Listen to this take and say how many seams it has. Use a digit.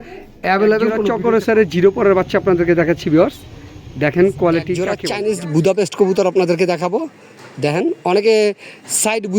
2